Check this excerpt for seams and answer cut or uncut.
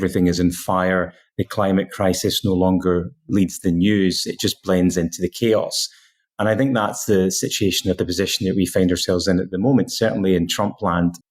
uncut